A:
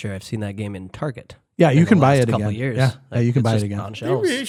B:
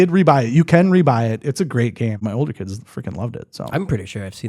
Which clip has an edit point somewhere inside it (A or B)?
B